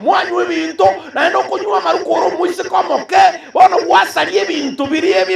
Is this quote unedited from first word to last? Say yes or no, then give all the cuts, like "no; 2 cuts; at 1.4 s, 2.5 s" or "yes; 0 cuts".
yes; 0 cuts